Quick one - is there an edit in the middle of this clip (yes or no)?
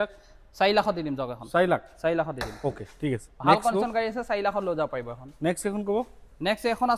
no